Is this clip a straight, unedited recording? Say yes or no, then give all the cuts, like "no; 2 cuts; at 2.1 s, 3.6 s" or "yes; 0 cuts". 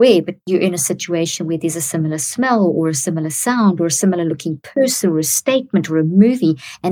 yes; 0 cuts